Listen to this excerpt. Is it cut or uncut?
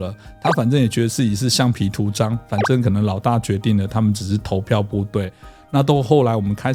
uncut